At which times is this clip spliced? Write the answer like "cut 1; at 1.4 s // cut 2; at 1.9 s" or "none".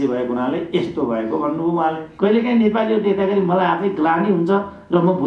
cut 1; at 2.1 s